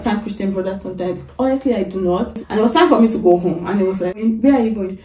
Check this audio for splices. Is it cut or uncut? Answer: cut